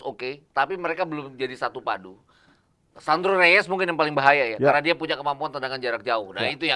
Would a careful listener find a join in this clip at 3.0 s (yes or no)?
no